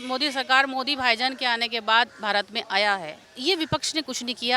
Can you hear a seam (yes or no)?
yes